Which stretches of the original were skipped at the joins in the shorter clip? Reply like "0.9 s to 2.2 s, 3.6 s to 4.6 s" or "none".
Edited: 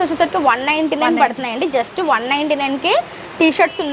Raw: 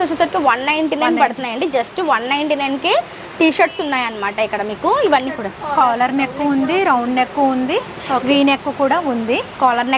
none